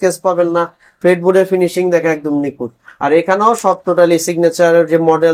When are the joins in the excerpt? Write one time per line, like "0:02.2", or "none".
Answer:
none